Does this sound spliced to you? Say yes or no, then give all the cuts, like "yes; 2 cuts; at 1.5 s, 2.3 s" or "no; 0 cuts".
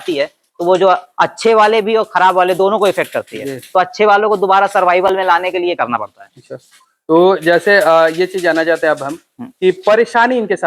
no; 0 cuts